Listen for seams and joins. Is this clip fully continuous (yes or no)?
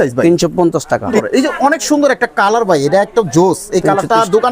no